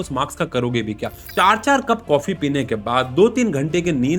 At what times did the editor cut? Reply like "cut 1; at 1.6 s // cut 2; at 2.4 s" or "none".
cut 1; at 1.2 s